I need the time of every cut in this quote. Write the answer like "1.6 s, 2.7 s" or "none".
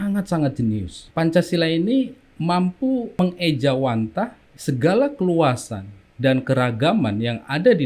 1.0 s, 2.2 s, 3.2 s, 4.5 s